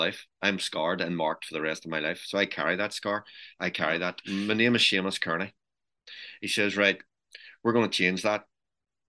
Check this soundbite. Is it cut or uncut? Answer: cut